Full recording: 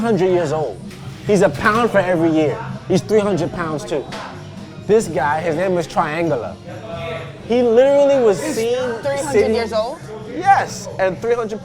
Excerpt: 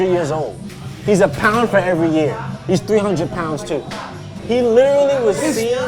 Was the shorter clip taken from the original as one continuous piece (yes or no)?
no